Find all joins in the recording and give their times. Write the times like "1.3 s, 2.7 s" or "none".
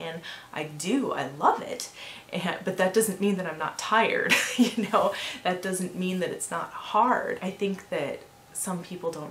7.4 s